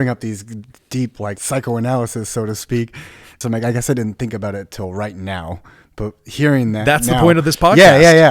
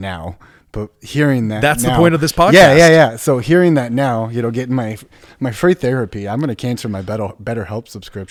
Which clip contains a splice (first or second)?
first